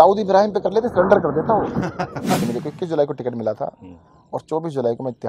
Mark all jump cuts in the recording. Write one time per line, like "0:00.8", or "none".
0:02.4